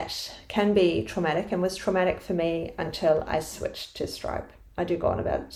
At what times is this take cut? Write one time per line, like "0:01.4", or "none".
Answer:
none